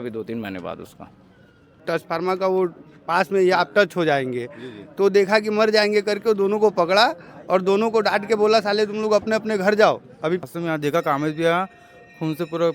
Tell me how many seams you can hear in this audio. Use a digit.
2